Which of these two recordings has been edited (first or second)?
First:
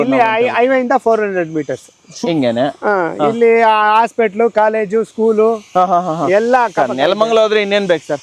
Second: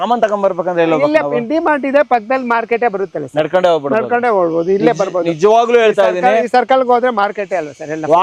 first